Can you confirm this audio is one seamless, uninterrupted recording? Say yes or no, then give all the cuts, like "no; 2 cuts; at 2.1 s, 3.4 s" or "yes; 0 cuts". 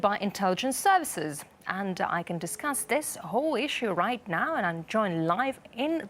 no; 1 cut; at 2.4 s